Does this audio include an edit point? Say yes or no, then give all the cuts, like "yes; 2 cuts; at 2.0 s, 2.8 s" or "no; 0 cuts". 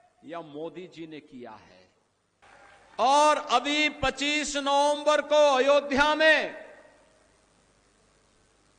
yes; 1 cut; at 2.4 s